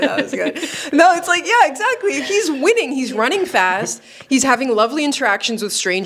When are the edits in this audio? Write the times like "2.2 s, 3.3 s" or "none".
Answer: none